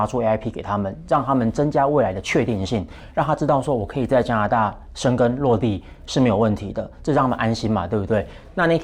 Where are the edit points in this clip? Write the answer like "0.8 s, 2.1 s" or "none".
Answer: none